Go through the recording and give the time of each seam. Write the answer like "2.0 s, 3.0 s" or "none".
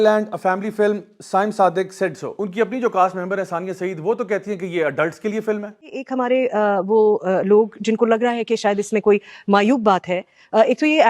2.5 s